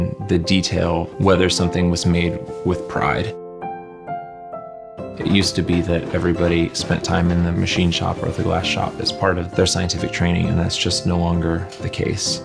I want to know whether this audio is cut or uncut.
cut